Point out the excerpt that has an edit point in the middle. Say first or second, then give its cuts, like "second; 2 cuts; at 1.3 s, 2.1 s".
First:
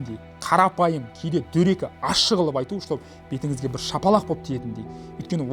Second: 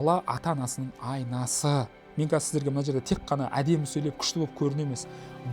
second; 1 cut; at 2.0 s